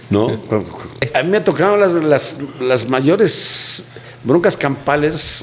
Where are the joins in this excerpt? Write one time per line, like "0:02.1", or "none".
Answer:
0:01.1